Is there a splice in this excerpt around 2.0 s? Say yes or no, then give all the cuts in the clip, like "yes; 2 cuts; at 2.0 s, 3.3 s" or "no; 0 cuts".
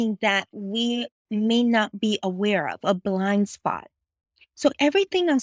no; 0 cuts